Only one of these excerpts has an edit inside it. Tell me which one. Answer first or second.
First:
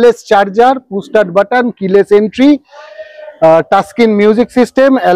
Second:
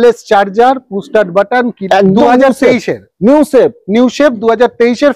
second